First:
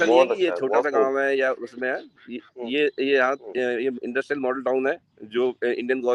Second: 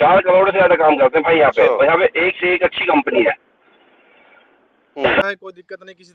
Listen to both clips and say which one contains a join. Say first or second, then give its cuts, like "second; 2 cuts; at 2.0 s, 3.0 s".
second; 1 cut; at 5.2 s